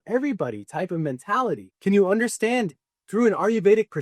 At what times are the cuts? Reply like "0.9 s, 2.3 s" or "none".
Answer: 1.7 s